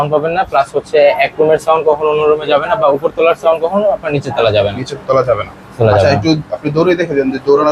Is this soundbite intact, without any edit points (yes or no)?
yes